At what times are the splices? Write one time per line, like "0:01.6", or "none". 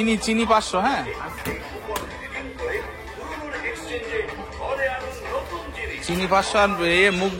none